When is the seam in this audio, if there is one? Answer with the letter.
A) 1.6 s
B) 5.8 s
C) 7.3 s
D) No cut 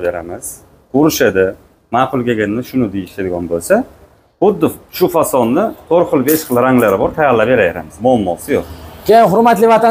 D